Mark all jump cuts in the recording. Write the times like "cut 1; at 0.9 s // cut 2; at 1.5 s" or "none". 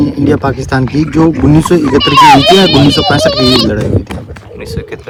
none